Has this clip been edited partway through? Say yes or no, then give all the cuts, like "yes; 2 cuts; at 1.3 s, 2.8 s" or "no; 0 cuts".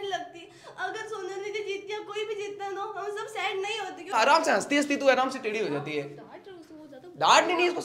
yes; 1 cut; at 4.1 s